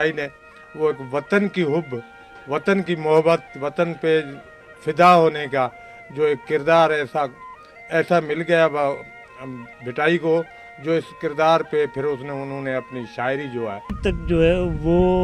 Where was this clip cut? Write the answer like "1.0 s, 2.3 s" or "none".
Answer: 14.0 s